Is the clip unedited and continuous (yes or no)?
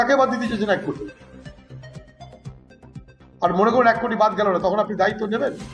no